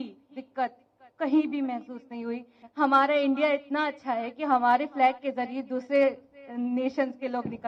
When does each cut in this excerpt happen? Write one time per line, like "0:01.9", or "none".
none